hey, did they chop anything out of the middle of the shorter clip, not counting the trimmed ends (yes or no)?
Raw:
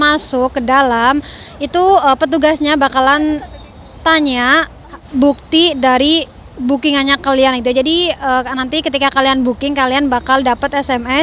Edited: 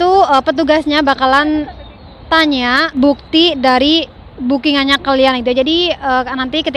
yes